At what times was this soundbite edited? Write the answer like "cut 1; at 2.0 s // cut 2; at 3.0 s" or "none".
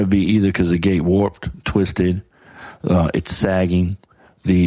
none